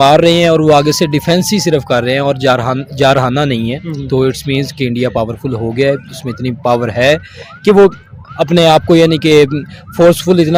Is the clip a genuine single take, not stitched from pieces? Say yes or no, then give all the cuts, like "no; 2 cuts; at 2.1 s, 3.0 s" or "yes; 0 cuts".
yes; 0 cuts